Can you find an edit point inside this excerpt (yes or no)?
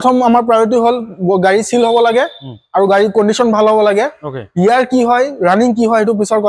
no